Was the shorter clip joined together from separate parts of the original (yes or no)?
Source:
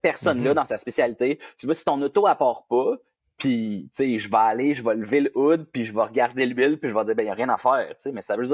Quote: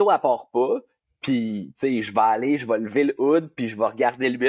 no